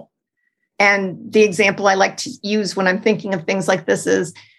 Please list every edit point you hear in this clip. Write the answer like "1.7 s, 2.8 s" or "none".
2.3 s